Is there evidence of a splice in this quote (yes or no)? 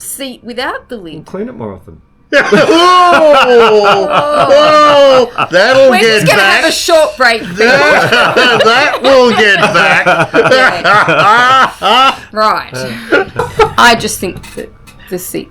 yes